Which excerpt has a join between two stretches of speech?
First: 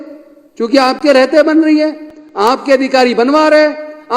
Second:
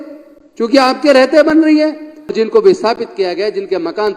second; 1 cut; at 2.3 s

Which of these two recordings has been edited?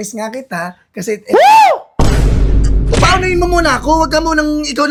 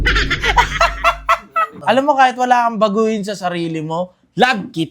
second; 1 cut; at 1.7 s

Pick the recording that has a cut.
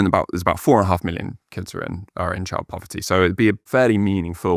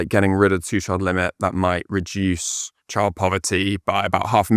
first; 1 cut; at 3.7 s

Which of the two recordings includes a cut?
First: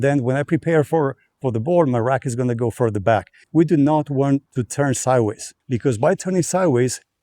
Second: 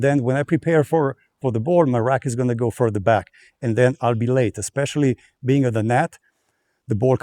first; 3 cuts; at 3.4 s, 4.6 s, 5.5 s

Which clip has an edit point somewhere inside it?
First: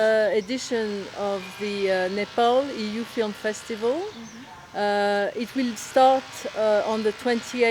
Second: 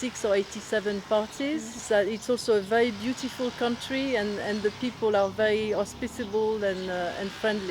second; 1 cut; at 1.8 s

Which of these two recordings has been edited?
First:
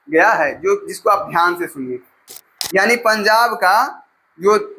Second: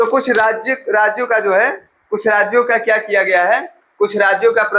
first; 1 cut; at 2.3 s

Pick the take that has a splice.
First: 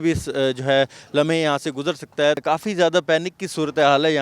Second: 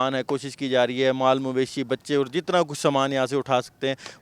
first; 1 cut; at 2.4 s

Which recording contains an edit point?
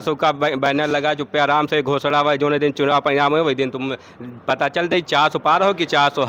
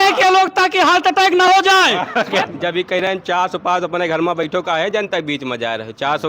second; 1 cut; at 2.4 s

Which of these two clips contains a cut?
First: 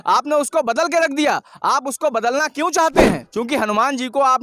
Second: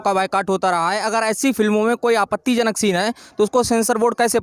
first; 1 cut; at 3.3 s

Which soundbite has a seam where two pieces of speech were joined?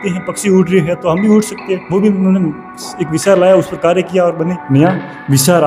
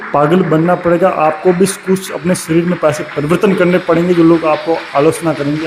first; 2 cuts; at 1.8 s, 4.6 s

